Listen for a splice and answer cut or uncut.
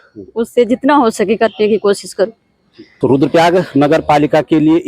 uncut